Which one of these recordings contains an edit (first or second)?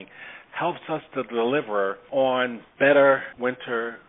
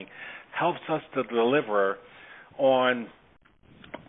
first